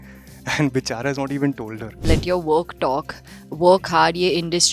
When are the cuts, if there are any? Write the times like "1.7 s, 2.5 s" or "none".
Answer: 2.0 s